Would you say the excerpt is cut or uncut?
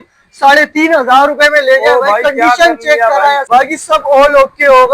cut